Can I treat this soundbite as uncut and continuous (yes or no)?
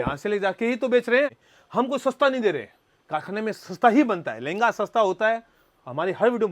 no